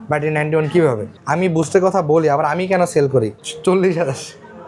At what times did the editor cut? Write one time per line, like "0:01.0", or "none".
0:01.1
0:03.4

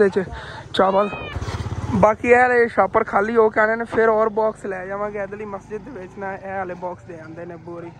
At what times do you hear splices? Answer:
none

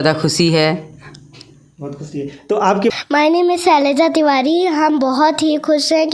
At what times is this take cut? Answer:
0:02.9

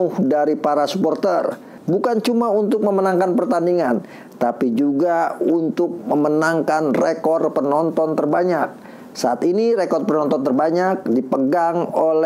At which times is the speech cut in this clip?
none

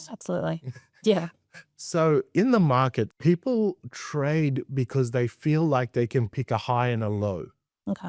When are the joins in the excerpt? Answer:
0:03.1

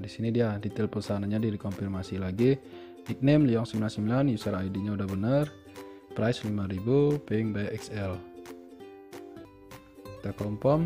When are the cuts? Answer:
0:09.4

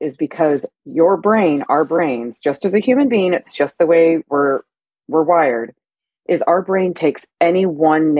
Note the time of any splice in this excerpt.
none

